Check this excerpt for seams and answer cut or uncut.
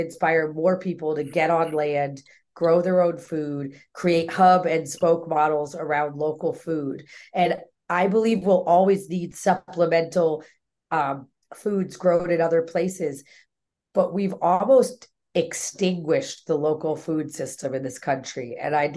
uncut